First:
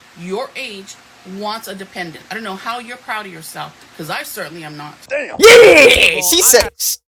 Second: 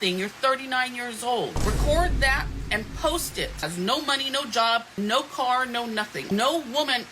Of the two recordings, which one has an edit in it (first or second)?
second